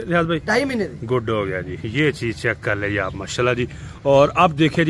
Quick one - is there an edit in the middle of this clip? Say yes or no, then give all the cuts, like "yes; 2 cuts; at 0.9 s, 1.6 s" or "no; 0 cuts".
no; 0 cuts